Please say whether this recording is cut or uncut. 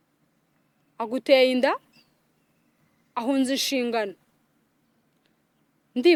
uncut